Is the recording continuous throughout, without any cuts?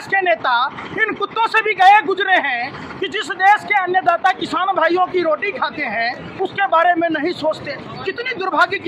yes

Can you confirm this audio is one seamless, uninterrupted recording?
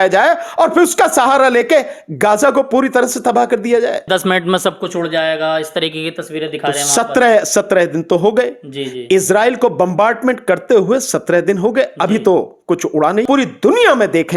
no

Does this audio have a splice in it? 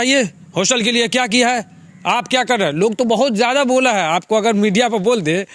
no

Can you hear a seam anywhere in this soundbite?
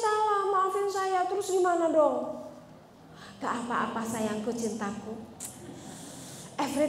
no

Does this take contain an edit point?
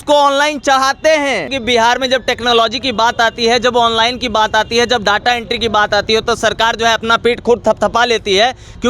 yes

